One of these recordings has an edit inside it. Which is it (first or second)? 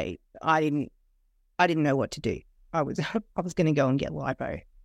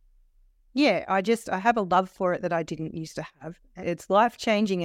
second